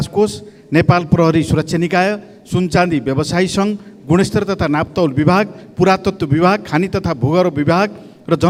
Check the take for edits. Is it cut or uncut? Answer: uncut